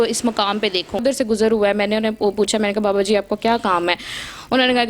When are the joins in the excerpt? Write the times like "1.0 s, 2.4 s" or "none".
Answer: 1.0 s